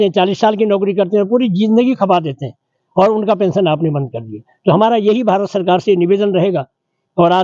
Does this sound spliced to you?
no; 0 cuts

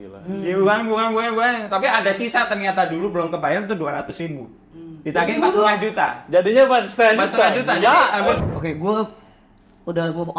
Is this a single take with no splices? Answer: no; 1 cut; at 8.4 s

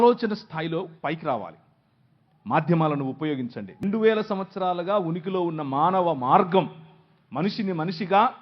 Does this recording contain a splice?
yes; 1 cut; at 3.8 s

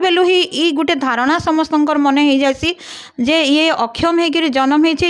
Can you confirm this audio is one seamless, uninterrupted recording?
yes; 0 cuts

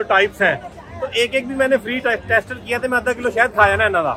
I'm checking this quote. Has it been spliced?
no; 0 cuts

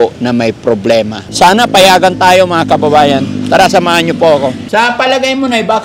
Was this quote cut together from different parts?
yes; 2 cuts; at 1.2 s, 4.6 s

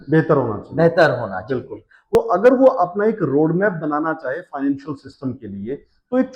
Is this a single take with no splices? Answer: no; 1 cut; at 2.2 s

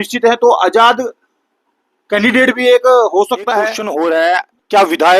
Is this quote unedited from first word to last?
no; 1 cut; at 3.8 s

